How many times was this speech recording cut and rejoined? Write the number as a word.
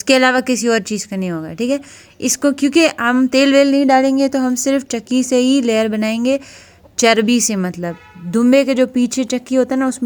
zero